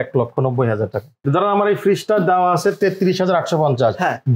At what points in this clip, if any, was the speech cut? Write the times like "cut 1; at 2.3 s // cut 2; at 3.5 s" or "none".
cut 1; at 1.2 s